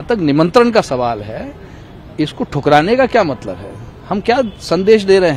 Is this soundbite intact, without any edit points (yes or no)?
yes